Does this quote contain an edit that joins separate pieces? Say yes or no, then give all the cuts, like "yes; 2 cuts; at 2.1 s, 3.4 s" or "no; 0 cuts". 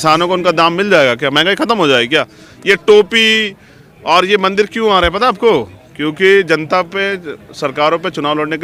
no; 0 cuts